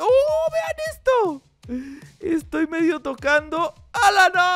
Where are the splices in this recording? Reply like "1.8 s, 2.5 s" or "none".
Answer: none

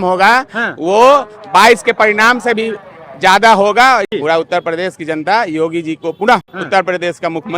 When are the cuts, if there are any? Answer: 4.1 s, 6.5 s

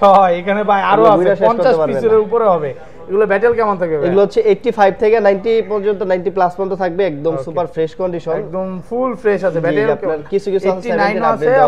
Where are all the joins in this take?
none

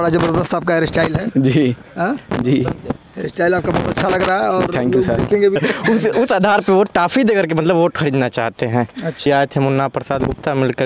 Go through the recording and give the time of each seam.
5.6 s, 9.3 s

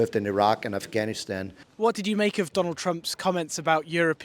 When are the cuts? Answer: none

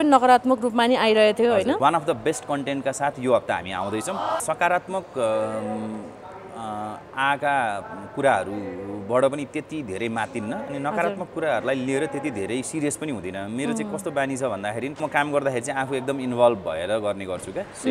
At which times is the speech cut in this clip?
1.8 s, 4.4 s, 15.0 s

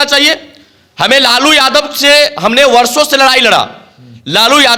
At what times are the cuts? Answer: none

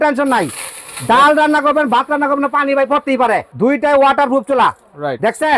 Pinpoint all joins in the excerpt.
3.5 s

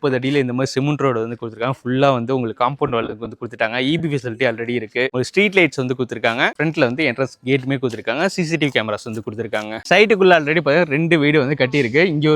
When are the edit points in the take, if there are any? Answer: 6.5 s, 9.8 s

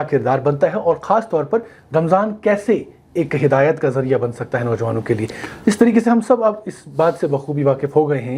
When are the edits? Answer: none

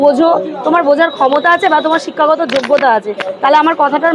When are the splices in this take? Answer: none

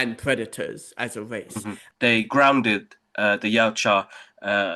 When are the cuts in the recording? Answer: 1.8 s

